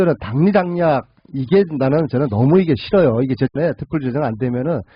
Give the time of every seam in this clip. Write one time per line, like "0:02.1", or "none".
0:03.5